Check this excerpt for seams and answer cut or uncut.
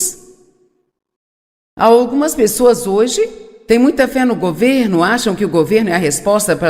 cut